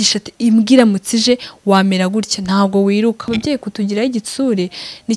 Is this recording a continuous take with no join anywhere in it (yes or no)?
no